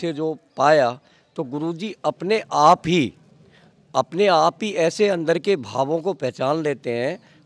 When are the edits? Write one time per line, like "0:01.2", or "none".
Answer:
none